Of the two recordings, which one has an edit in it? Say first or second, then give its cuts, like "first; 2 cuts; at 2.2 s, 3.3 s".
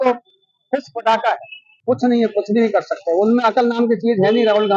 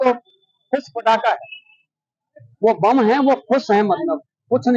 first; 1 cut; at 1.7 s